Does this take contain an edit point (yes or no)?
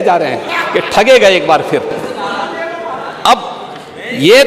no